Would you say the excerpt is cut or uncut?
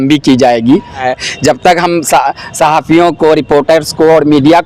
cut